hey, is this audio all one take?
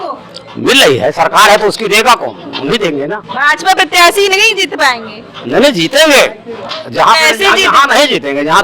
yes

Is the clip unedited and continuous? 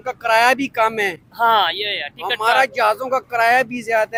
yes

